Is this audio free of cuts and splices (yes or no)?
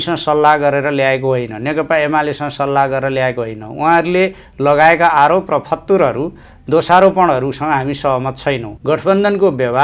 no